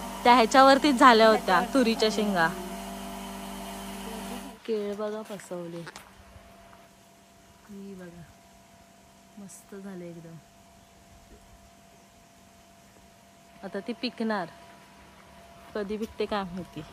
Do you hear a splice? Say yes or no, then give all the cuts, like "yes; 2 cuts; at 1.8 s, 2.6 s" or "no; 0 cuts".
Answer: yes; 1 cut; at 4.5 s